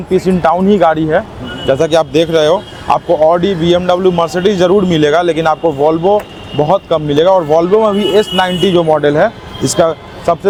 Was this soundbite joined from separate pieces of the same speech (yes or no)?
no